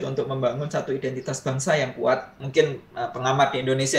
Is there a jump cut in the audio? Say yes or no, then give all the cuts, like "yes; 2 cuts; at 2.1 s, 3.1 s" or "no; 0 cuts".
yes; 1 cut; at 2.4 s